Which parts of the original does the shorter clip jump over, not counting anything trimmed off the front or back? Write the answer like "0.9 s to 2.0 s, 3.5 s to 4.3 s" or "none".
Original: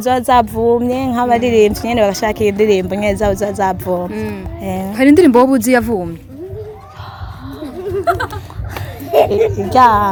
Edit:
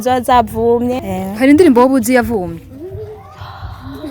1.0 s to 4.6 s